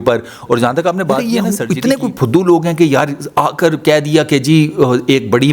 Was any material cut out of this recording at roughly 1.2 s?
yes; 1 cut; at 1.2 s

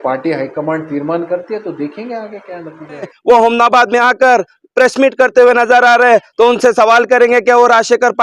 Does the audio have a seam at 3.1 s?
yes; 1 cut; at 3.1 s

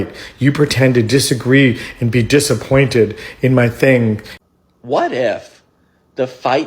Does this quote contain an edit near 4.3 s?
yes; 1 cut; at 4.3 s

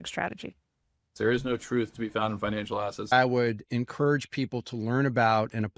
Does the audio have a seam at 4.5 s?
no; 2 cuts; at 1.1 s, 3.1 s

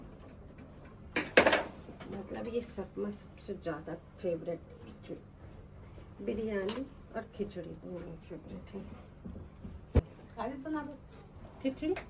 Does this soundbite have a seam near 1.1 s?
no; 1 cut; at 10.0 s

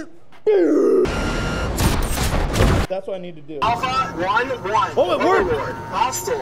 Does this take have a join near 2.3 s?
no; 2 cuts; at 1.1 s, 3.6 s

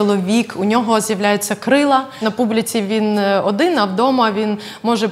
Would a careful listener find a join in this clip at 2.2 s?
yes; 1 cut; at 2.2 s

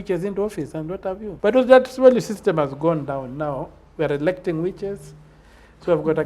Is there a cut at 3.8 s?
no; 1 cut; at 1.3 s

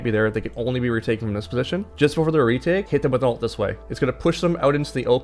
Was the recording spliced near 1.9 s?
yes; 3 cuts; at 1.9 s, 2.9 s, 3.8 s

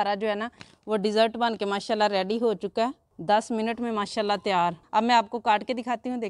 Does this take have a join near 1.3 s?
no; 2 cuts; at 3.1 s, 4.8 s

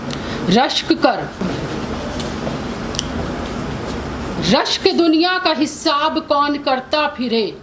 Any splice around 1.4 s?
yes; 1 cut; at 1.4 s

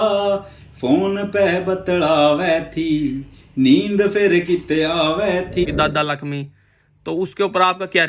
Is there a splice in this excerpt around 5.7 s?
yes; 1 cut; at 5.7 s

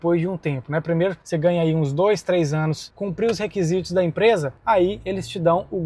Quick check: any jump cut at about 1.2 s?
no; 1 cut; at 2.9 s

